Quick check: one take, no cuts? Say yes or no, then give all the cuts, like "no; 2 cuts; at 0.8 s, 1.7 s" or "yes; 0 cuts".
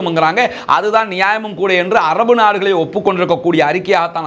yes; 0 cuts